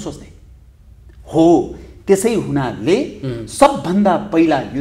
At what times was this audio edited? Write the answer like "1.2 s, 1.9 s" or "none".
none

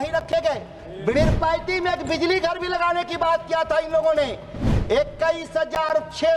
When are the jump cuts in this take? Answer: 1.1 s

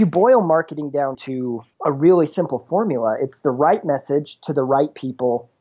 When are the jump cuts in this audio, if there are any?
1.3 s

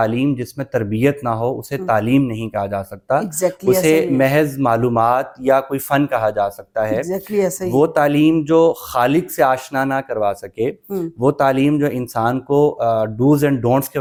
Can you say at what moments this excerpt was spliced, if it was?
none

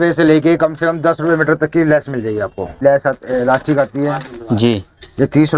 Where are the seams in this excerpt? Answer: 2.8 s

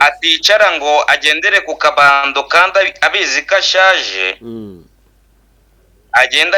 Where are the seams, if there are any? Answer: none

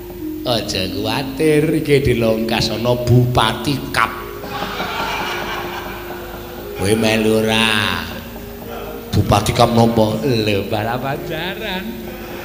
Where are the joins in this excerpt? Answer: none

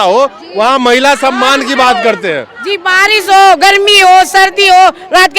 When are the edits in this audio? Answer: none

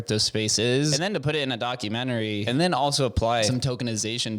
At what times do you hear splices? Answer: 0.9 s, 2.4 s, 3.5 s

